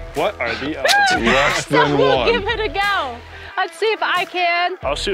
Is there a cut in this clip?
no; 0 cuts

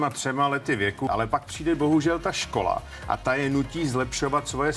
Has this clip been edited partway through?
yes; 1 cut; at 1.1 s

